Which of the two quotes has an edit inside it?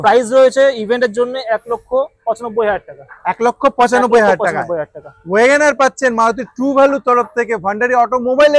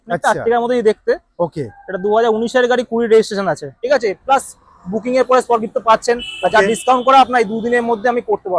second; 1 cut; at 3.7 s

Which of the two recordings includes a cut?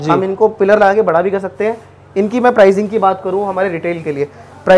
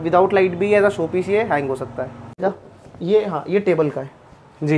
second; 1 cut; at 2.4 s

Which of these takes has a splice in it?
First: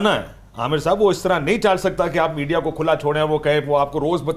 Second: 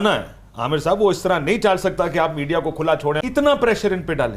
second; 1 cut; at 3.2 s

